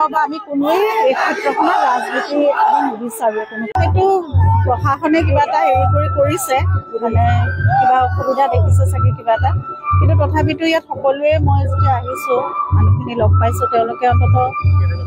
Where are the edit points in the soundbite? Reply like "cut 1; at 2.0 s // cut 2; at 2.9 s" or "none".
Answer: cut 1; at 3.7 s